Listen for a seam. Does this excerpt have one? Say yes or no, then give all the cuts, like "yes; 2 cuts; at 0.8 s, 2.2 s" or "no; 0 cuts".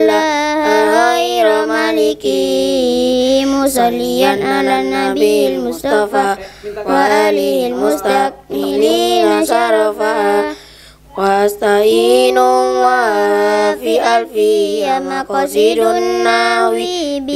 no; 0 cuts